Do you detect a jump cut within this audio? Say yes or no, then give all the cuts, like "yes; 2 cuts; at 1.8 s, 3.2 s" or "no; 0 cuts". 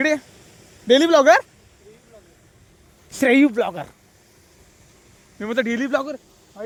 no; 0 cuts